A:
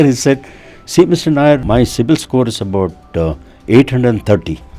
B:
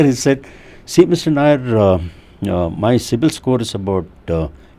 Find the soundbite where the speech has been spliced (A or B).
A